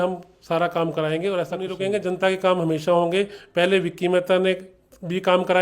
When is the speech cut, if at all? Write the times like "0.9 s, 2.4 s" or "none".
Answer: 1.8 s